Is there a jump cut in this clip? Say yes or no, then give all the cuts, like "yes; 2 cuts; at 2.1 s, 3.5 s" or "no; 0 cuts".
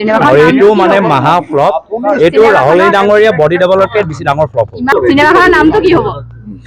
yes; 1 cut; at 4.9 s